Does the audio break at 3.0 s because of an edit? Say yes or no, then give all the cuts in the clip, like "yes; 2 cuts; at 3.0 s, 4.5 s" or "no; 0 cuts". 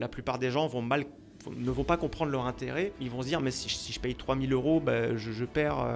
yes; 1 cut; at 3.0 s